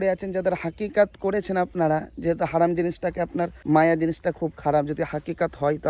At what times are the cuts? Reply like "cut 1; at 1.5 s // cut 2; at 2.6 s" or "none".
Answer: none